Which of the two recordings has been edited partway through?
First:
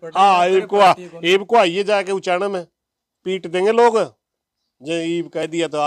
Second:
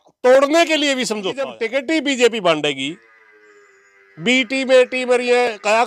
second; 1 cut; at 1.6 s

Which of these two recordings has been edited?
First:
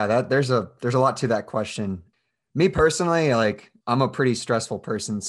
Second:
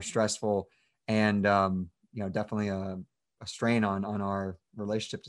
first; 1 cut; at 2.1 s

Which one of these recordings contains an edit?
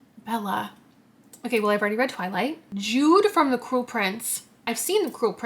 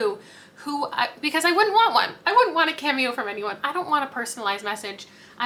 first; 1 cut; at 2.7 s

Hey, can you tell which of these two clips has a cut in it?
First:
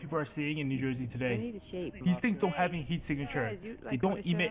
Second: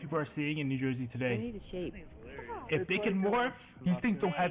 first; 1 cut; at 1.9 s

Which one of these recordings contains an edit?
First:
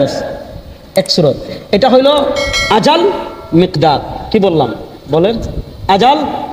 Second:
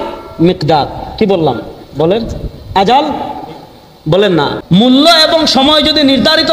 second; 1 cut; at 4.6 s

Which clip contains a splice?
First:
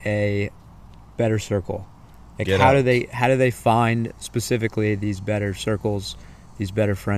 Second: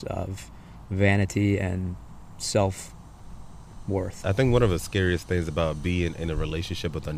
second; 1 cut; at 4.1 s

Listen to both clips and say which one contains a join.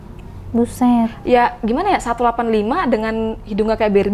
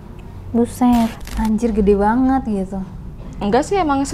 second; 1 cut; at 1.2 s

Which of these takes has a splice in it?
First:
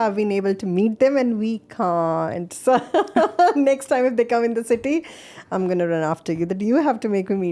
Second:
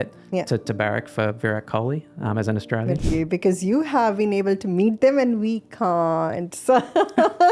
second; 1 cut; at 3.0 s

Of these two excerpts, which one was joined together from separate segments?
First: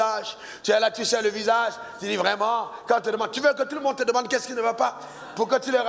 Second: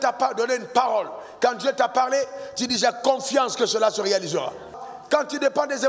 second; 1 cut; at 4.9 s

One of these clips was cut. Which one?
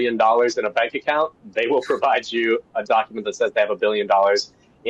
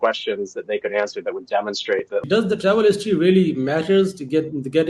second; 1 cut; at 2.2 s

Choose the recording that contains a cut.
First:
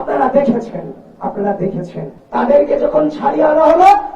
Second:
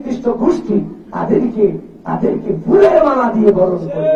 first; 1 cut; at 2.1 s

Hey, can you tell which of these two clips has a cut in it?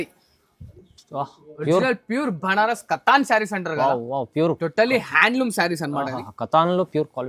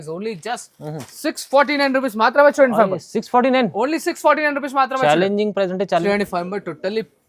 second; 1 cut; at 6.0 s

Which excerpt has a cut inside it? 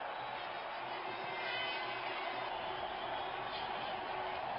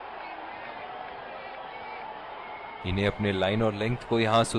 second; 1 cut; at 2.8 s

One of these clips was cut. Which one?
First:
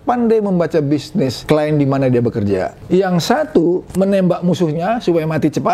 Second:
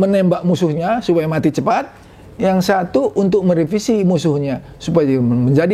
first; 2 cuts; at 1.4 s, 2.8 s

